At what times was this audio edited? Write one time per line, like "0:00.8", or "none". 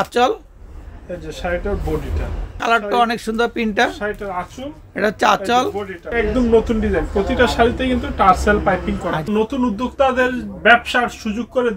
0:02.6
0:06.0
0:09.2